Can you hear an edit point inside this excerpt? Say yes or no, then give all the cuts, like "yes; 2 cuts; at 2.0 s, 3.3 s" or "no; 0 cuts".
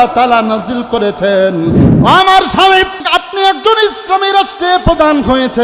yes; 2 cuts; at 1.9 s, 3.1 s